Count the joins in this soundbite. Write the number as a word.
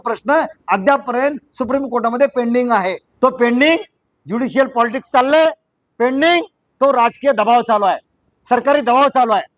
one